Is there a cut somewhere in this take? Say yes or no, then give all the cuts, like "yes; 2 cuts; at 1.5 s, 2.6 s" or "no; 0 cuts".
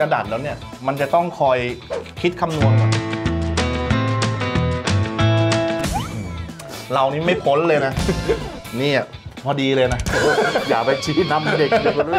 yes; 2 cuts; at 5.9 s, 8.6 s